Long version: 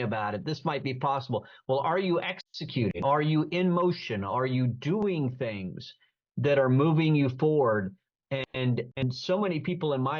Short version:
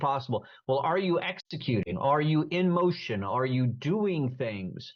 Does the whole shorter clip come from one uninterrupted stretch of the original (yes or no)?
yes